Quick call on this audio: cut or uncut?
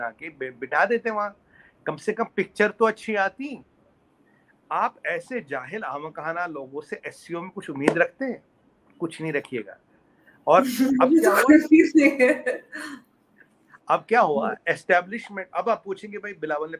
uncut